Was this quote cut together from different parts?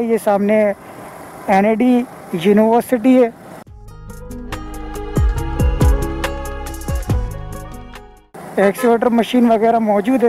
no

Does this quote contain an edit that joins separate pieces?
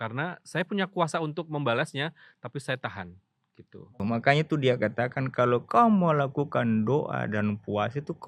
yes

